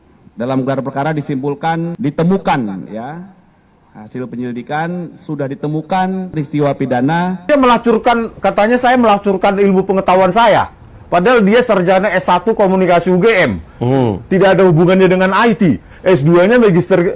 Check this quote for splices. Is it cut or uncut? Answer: cut